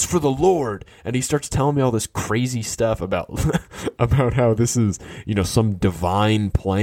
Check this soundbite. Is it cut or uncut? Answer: uncut